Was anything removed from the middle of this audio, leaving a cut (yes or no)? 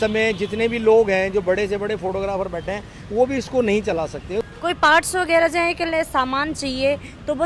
yes